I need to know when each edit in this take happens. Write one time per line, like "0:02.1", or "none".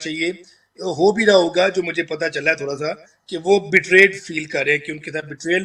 none